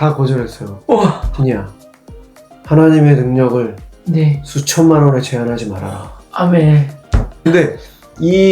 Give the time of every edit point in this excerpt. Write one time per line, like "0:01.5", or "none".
0:01.3
0:07.5